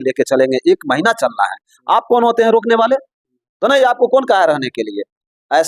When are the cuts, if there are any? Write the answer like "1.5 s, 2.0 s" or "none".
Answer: none